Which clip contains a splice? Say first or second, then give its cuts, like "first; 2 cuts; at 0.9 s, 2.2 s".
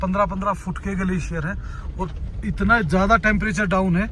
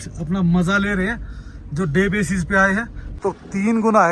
second; 1 cut; at 3.1 s